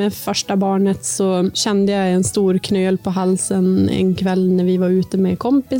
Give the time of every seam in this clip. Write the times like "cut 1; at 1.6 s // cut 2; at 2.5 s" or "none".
cut 1; at 1.6 s